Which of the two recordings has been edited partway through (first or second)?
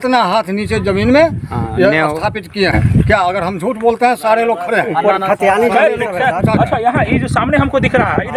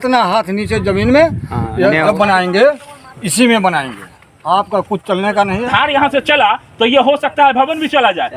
second